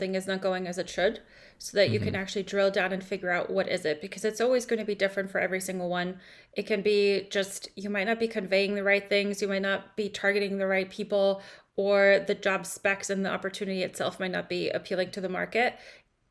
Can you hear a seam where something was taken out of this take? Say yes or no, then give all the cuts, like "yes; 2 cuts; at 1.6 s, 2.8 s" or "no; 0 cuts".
no; 0 cuts